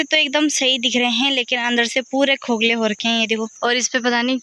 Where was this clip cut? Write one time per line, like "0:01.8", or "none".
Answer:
0:03.5